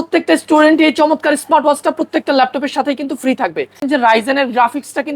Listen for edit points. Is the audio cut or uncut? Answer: cut